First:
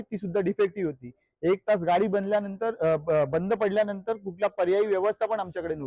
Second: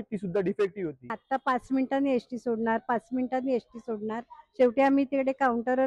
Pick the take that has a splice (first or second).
second